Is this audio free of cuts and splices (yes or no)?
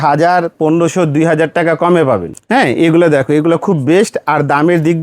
no